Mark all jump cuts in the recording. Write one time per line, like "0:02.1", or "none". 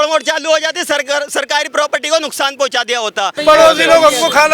0:03.4